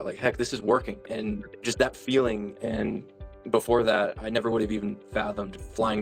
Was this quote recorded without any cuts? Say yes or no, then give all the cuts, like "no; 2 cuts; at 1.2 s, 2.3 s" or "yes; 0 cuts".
no; 1 cut; at 2.5 s